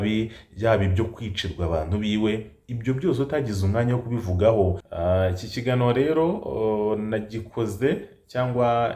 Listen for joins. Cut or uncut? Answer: cut